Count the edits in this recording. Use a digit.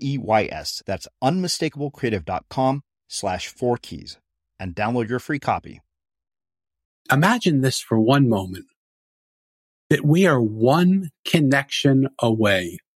1